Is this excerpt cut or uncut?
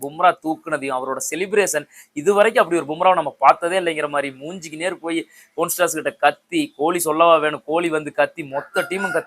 uncut